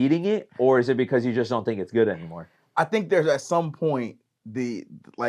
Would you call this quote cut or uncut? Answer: uncut